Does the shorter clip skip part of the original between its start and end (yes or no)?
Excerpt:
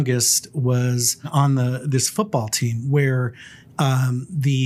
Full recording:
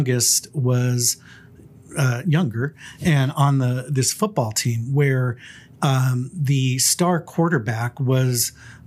yes